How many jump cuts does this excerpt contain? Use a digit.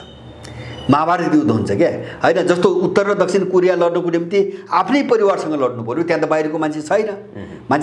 0